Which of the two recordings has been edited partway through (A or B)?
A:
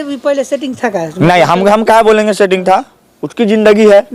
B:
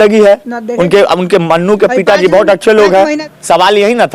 B